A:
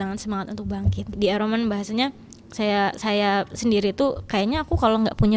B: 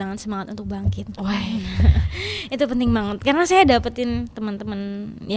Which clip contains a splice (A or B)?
A